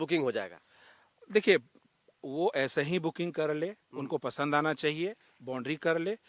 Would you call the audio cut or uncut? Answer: uncut